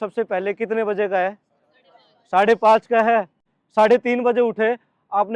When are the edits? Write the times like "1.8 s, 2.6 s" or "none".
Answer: 3.4 s

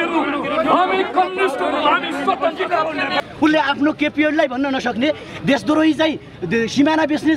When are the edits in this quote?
3.1 s

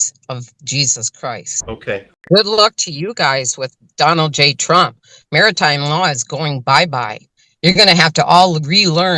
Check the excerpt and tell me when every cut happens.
2.1 s

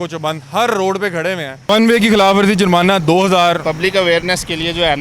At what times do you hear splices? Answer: 1.7 s, 3.6 s

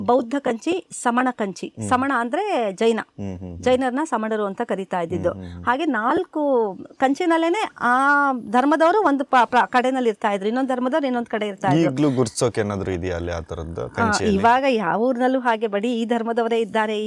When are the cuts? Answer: none

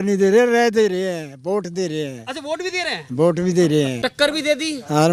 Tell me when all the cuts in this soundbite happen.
4.0 s

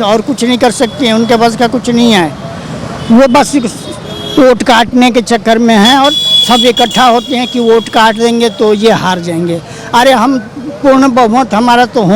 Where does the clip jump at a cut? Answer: none

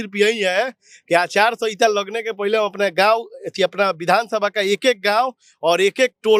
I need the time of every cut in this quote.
none

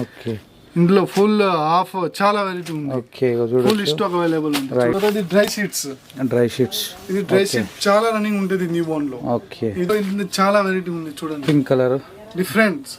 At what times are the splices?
4.9 s, 9.9 s

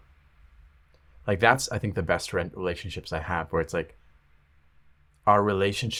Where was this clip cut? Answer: none

